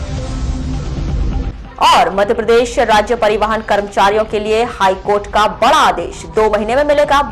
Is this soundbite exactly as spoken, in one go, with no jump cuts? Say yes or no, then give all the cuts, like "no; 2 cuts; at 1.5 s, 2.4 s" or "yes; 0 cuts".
yes; 0 cuts